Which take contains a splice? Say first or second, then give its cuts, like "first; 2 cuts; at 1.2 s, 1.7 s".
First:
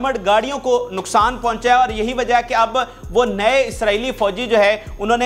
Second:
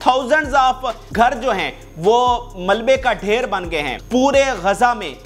second; 2 cuts; at 1.0 s, 3.9 s